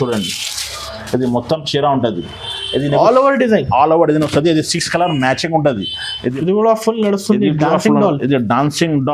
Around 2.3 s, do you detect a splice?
no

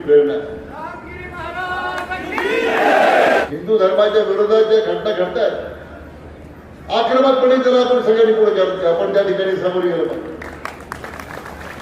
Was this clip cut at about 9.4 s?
no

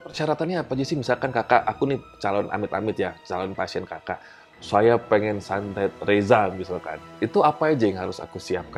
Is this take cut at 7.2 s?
no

